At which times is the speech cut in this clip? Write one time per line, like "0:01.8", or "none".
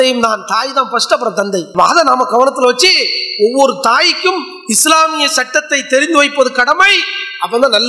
none